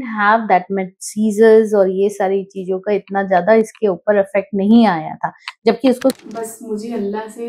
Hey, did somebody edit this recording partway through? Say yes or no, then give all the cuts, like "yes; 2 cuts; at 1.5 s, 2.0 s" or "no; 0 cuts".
yes; 1 cut; at 6.2 s